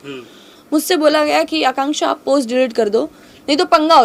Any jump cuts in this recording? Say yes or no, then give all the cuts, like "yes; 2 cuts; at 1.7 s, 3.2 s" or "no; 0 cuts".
no; 0 cuts